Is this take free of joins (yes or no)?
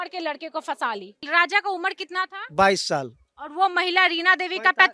no